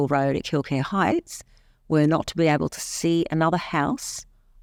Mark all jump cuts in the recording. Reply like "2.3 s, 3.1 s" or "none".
none